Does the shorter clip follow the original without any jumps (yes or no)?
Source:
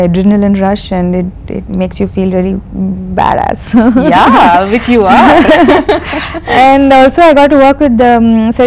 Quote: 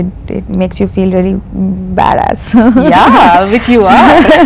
yes